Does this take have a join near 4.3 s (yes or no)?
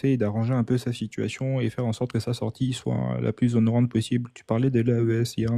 no